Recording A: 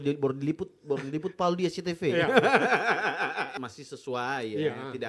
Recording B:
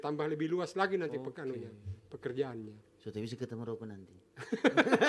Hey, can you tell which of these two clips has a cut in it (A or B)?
A